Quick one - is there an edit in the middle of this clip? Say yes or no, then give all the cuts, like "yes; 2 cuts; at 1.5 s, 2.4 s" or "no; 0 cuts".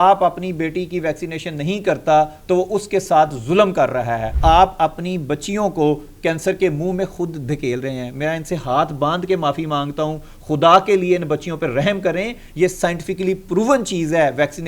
yes; 1 cut; at 4.3 s